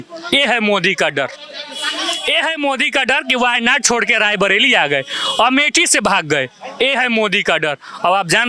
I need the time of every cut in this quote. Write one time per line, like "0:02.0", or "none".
none